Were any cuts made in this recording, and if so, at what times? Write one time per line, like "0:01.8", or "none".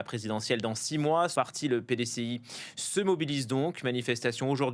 0:01.3